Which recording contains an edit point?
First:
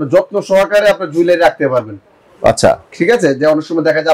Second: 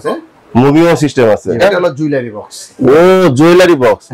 second; 1 cut; at 1.6 s

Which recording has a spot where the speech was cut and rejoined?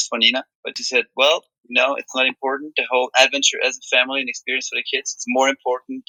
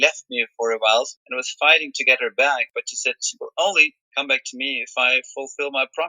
second; 2 cuts; at 1.2 s, 2.7 s

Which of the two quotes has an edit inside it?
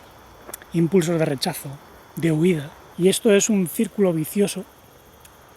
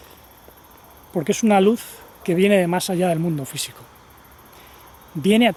first; 1 cut; at 2.8 s

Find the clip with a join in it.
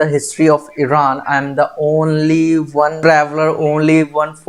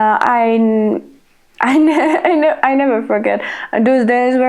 first; 1 cut; at 3.0 s

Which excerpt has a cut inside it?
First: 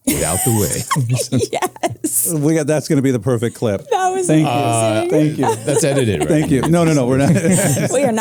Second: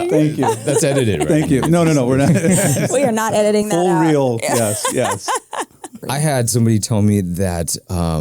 second; 1 cut; at 5.9 s

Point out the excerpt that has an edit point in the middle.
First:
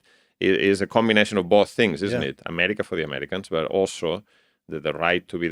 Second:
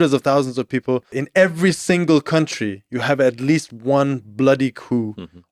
second; 1 cut; at 1.2 s

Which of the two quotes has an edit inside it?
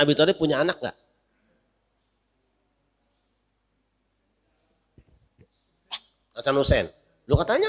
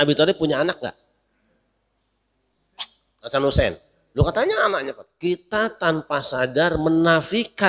second; 2 cuts; at 2.5 s, 5.0 s

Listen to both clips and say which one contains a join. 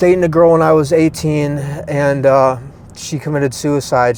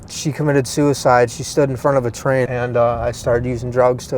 second; 1 cut; at 2.5 s

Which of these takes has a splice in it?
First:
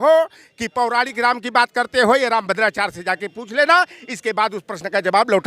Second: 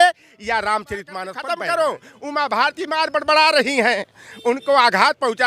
second; 1 cut; at 1.3 s

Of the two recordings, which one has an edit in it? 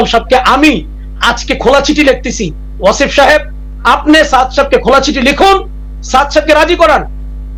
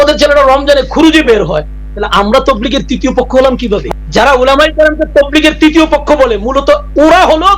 second; 1 cut; at 3.8 s

